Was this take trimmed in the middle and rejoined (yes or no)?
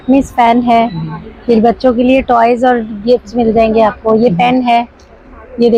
no